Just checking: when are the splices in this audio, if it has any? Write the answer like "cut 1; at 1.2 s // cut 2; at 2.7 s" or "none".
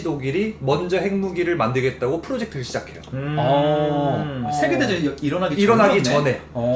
none